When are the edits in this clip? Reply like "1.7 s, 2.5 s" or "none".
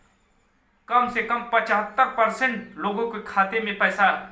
none